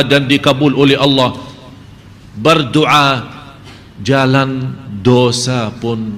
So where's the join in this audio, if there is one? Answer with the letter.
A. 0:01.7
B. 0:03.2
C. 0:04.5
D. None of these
D